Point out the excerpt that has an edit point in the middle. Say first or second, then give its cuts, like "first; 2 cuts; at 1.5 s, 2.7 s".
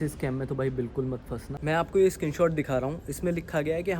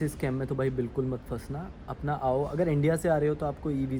first; 1 cut; at 1.5 s